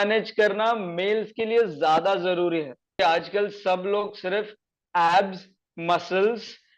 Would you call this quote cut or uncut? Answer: cut